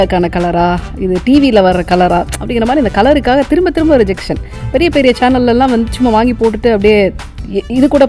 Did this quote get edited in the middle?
no; 0 cuts

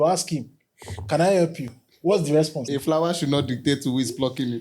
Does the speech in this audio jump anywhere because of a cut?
yes; 1 cut; at 2.6 s

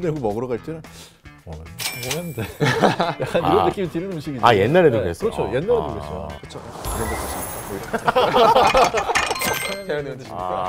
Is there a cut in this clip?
no; 0 cuts

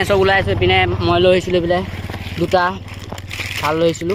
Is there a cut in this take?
no; 0 cuts

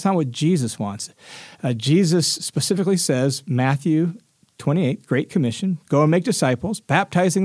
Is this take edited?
no; 0 cuts

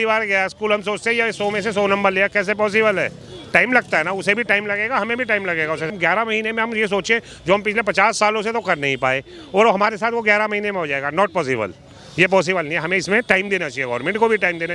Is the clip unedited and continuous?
no; 1 cut; at 5.9 s

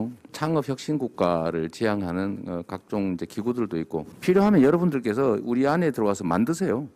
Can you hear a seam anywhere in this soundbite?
no; 0 cuts

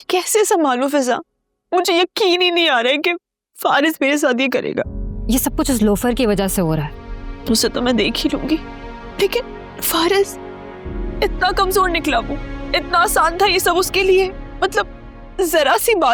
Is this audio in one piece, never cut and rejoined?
yes; 0 cuts

